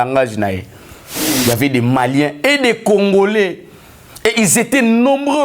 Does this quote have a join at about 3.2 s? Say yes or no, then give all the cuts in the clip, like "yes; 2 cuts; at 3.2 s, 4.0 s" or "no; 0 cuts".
no; 1 cut; at 1.2 s